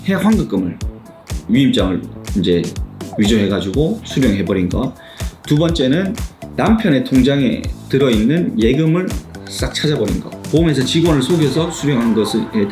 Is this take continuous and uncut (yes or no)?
no